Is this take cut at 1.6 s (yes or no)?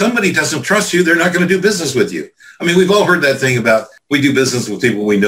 no